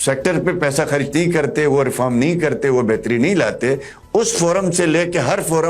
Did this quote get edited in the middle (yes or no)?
no